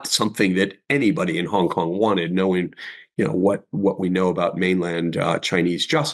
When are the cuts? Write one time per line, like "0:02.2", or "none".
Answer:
none